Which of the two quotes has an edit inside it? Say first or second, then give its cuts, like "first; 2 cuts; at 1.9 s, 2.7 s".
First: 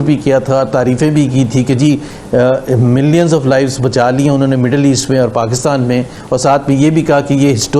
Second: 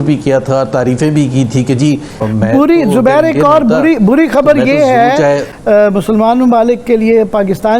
second; 2 cuts; at 2.1 s, 5.5 s